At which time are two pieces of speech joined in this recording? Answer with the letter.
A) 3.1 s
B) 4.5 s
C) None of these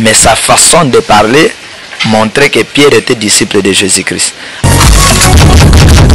C